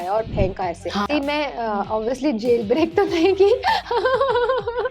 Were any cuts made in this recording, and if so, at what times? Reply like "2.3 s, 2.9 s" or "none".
1.1 s